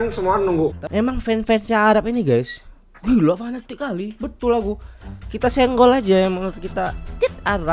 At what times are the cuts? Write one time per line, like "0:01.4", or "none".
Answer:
0:00.9